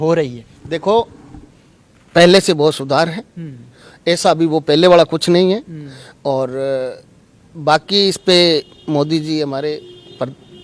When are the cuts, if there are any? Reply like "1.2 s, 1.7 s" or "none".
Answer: none

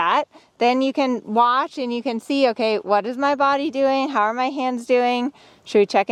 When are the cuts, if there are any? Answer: none

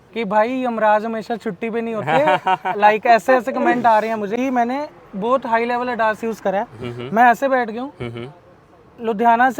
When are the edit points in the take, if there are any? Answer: none

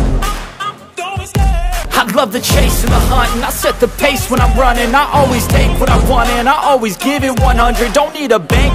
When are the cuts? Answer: 1.8 s

